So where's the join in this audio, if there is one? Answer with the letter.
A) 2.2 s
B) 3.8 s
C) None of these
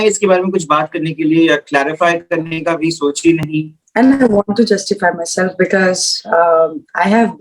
B